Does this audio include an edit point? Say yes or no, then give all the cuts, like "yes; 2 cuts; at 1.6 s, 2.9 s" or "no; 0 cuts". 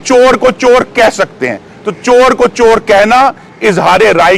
no; 0 cuts